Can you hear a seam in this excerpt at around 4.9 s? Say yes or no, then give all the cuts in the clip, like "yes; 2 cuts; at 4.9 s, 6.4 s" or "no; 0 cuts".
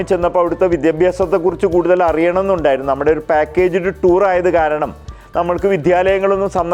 no; 0 cuts